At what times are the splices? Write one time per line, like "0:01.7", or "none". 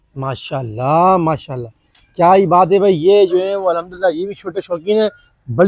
none